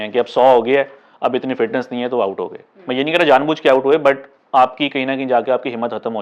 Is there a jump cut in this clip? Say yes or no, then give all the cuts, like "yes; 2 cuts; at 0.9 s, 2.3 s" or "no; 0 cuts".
no; 0 cuts